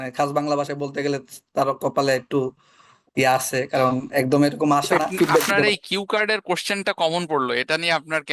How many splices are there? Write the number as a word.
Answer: one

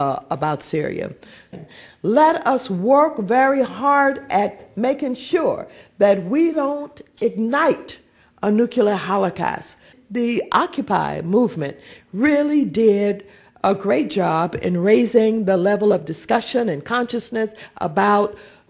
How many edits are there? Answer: two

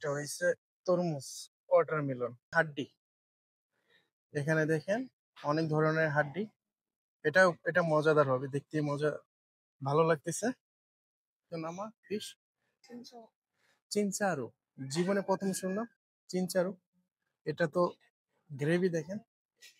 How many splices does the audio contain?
two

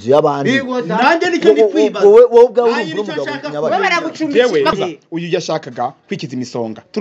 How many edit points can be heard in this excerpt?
one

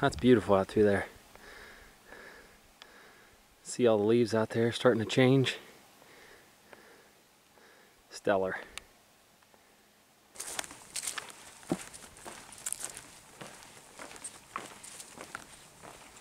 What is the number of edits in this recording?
zero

